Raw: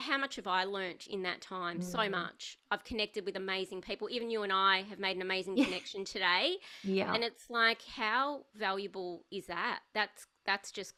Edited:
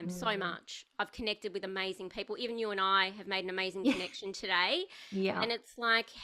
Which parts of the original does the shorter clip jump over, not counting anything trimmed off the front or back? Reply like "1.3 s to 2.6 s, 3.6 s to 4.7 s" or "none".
none